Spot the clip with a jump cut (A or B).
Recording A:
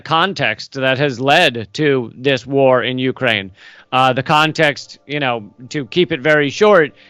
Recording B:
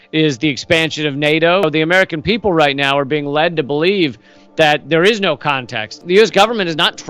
B